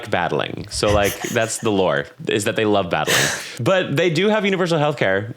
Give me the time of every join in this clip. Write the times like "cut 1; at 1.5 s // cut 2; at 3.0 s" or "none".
cut 1; at 3.5 s